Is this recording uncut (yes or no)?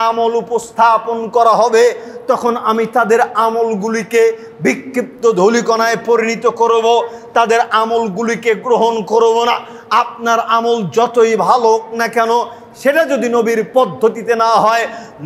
yes